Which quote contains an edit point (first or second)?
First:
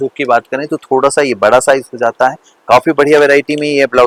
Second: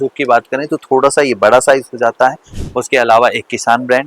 second